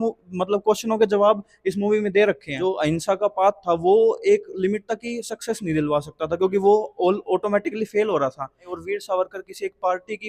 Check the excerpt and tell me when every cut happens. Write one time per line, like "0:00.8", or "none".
0:02.5
0:08.7